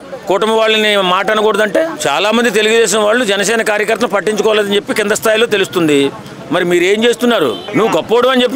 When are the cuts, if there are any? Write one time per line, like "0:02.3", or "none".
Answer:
0:02.0
0:07.6